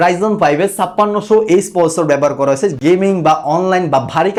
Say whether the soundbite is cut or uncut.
uncut